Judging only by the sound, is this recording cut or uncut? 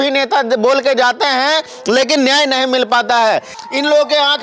cut